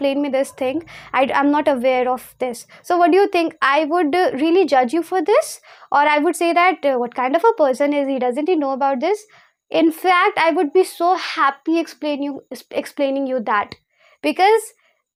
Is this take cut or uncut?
uncut